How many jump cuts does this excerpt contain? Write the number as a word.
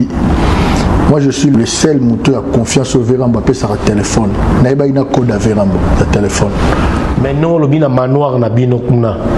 zero